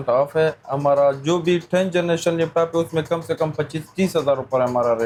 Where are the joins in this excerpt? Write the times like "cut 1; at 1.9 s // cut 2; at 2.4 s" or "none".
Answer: none